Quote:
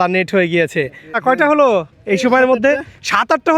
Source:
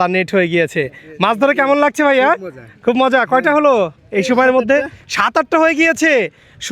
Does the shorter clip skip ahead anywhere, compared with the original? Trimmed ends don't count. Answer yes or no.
yes